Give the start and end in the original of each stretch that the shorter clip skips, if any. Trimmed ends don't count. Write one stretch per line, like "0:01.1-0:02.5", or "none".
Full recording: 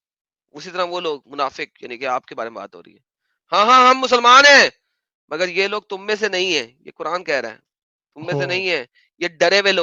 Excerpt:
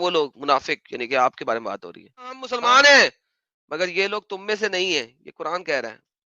0:03.4-0:04.1